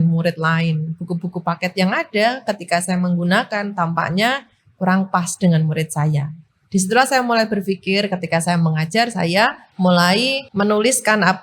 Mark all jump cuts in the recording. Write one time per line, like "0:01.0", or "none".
0:09.6
0:10.4